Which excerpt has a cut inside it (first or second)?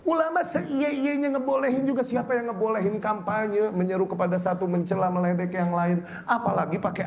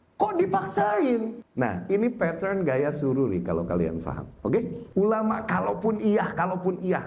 second